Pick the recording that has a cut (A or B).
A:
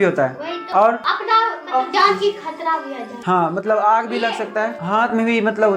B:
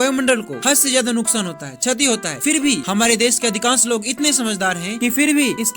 B